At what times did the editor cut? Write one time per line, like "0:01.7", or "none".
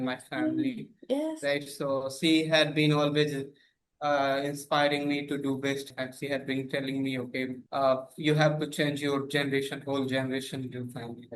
0:05.9
0:07.6